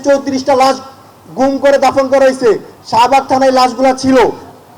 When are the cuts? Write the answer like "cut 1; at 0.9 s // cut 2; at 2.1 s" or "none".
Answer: cut 1; at 2.7 s